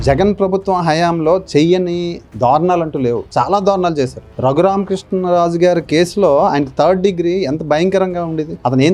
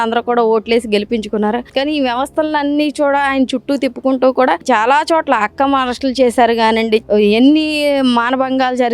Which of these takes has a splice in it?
second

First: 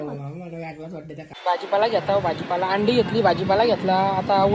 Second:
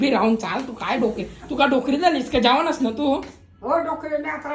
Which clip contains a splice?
first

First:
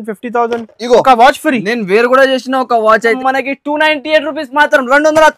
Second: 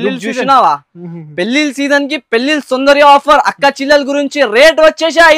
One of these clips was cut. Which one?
first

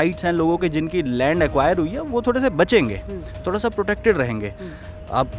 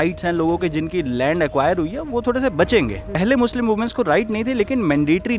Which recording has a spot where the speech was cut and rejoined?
second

